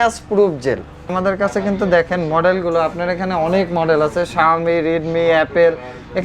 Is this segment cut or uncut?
cut